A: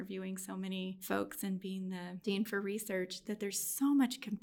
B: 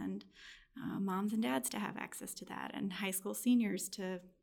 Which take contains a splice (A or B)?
A